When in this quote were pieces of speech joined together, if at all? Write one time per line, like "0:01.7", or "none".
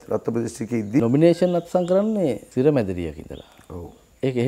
0:01.0
0:02.4